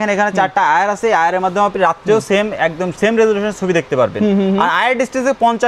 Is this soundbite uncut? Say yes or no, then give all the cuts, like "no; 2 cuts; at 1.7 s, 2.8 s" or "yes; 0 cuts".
yes; 0 cuts